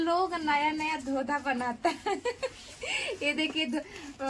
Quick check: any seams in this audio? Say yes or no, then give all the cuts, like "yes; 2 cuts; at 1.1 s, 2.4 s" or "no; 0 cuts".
no; 0 cuts